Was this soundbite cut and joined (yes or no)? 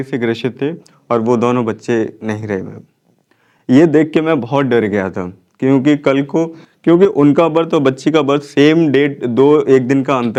no